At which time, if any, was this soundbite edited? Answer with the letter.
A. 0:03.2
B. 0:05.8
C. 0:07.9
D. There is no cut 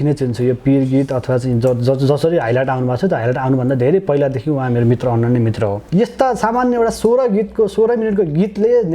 B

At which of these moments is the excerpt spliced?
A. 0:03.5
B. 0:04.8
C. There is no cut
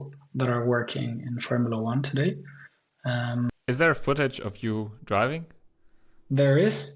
A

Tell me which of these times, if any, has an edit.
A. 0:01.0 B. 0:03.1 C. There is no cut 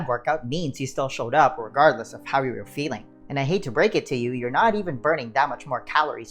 B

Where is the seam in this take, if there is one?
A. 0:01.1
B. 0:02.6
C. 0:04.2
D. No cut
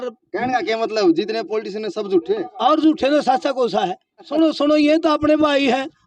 C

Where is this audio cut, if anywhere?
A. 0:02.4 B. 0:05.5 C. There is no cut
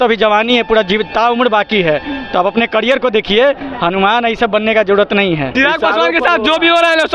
B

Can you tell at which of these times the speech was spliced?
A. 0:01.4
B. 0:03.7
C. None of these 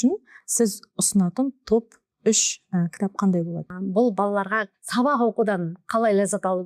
B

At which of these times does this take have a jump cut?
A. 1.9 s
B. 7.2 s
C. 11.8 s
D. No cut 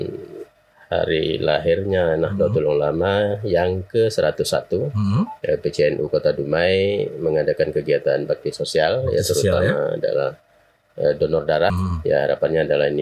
C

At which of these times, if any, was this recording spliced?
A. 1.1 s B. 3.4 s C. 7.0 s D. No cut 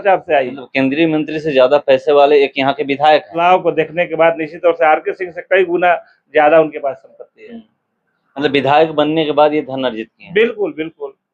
B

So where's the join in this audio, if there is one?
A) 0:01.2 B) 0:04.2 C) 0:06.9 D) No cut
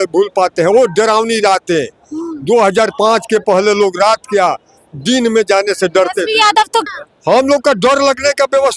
C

